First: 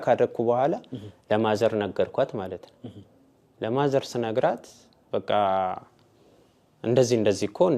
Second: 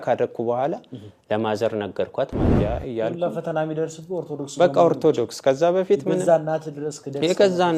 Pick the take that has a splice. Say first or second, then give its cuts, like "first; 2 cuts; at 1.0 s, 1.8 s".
second; 1 cut; at 2.5 s